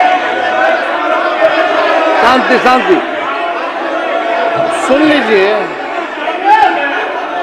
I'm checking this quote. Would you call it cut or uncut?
uncut